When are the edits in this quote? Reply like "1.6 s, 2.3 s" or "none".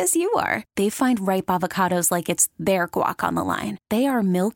none